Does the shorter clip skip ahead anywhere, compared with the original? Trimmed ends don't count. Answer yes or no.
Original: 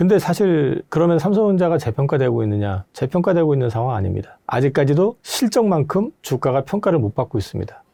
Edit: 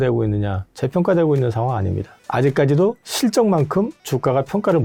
no